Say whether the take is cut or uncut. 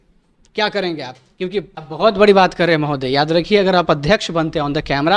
cut